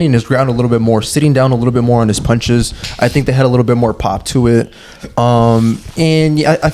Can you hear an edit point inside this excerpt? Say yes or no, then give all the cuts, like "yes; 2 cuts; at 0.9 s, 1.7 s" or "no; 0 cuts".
no; 0 cuts